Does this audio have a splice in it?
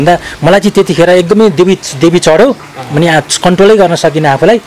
no; 0 cuts

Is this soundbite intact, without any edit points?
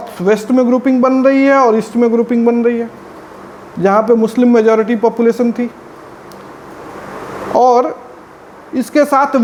yes; 0 cuts

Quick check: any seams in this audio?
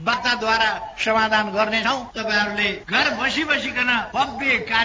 yes; 2 cuts; at 2.8 s, 4.1 s

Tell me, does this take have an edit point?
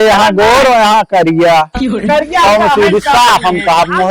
no; 0 cuts

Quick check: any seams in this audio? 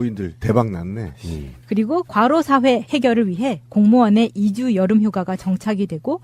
yes; 1 cut; at 3.1 s

